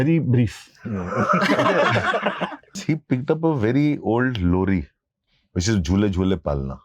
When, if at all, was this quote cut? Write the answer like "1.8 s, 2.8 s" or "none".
2.8 s